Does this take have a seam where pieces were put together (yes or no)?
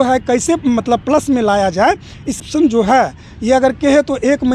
yes